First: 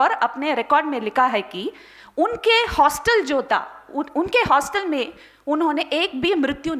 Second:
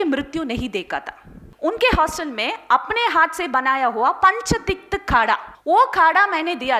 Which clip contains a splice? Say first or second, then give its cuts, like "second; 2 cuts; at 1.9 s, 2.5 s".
second; 2 cuts; at 1.4 s, 5.5 s